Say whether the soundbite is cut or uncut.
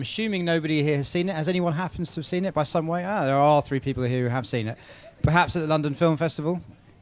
cut